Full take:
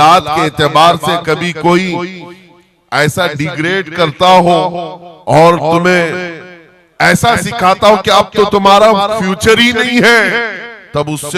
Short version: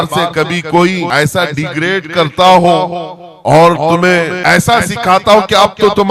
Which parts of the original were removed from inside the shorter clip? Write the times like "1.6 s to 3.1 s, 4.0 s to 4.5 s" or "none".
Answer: 2.0 s to 2.9 s, 6.2 s to 6.9 s